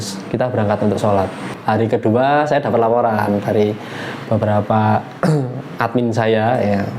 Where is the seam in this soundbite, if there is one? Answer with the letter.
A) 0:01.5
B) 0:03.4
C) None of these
A